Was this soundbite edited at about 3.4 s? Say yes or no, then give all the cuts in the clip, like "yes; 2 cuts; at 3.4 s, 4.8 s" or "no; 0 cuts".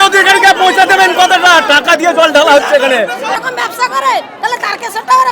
yes; 1 cut; at 3.4 s